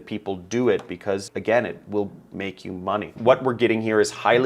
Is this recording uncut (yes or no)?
no